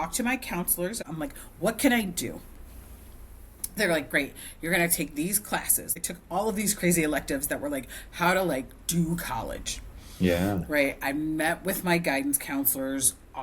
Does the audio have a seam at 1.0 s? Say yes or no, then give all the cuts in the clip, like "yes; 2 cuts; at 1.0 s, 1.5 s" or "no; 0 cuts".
yes; 2 cuts; at 1.0 s, 6.0 s